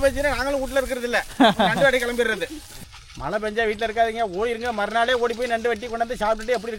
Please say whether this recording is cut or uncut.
cut